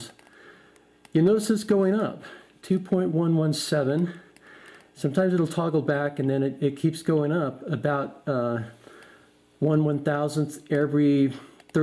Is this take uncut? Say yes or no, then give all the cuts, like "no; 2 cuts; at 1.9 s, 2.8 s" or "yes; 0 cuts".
no; 1 cut; at 6.1 s